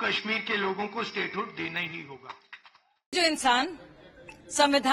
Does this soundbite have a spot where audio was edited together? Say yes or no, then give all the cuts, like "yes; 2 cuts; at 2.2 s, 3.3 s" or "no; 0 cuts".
no; 0 cuts